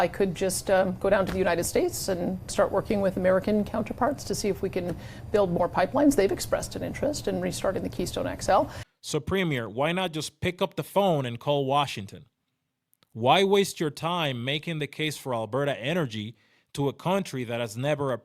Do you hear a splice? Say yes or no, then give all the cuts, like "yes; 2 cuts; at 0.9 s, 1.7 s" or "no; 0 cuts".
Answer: yes; 1 cut; at 8.8 s